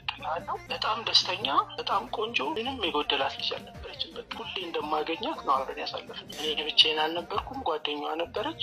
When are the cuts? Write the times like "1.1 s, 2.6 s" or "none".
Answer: none

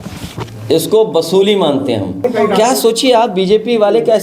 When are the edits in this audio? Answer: 2.2 s

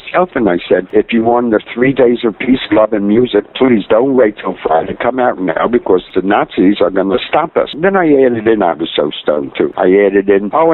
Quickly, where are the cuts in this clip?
6.1 s, 7.7 s

